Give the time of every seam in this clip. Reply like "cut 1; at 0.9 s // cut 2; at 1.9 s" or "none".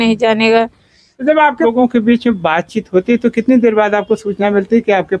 cut 1; at 1.6 s